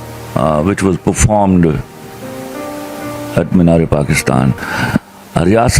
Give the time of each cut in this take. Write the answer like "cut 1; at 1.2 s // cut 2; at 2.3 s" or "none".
cut 1; at 4.7 s